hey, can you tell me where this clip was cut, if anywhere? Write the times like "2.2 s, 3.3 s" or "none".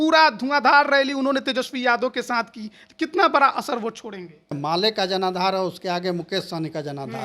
4.6 s